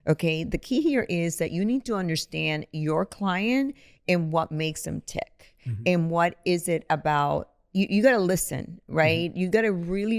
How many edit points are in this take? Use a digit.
0